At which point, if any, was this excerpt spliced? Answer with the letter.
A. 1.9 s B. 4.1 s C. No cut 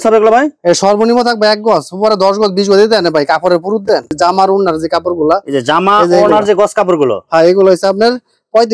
B